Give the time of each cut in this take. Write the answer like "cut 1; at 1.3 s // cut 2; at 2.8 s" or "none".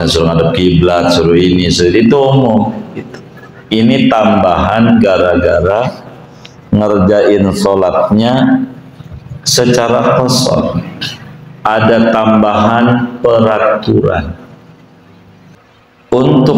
cut 1; at 15.6 s